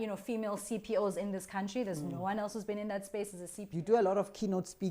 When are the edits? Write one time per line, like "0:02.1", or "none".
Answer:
0:03.7